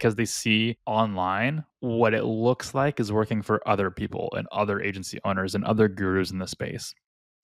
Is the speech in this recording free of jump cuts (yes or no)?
no